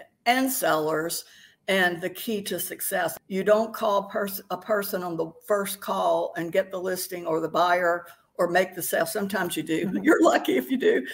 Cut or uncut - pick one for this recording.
cut